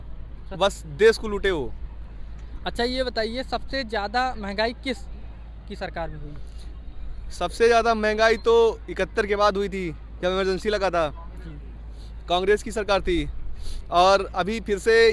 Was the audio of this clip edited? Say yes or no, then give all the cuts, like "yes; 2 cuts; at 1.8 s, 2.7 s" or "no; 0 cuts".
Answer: no; 0 cuts